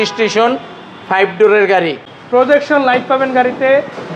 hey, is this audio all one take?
no; 1 cut; at 2.1 s

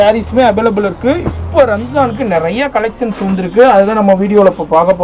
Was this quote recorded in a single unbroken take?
yes; 0 cuts

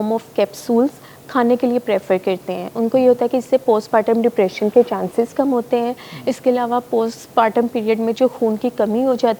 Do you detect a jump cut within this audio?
no; 0 cuts

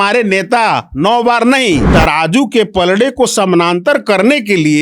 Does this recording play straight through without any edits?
no; 1 cut; at 1.9 s

